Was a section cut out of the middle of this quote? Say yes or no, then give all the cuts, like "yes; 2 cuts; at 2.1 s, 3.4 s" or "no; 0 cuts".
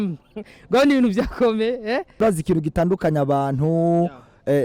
yes; 1 cut; at 2.2 s